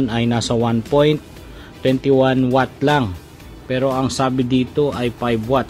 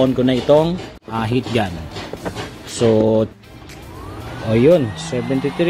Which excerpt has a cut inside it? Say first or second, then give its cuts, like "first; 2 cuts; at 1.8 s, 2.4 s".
second; 1 cut; at 0.9 s